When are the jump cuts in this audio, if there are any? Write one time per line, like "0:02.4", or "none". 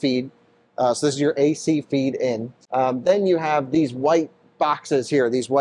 0:02.5